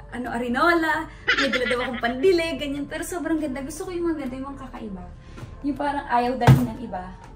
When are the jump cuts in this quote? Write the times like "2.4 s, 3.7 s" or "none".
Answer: none